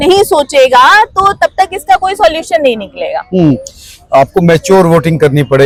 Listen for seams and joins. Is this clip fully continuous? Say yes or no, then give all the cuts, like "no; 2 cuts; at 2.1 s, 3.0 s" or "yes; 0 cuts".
yes; 0 cuts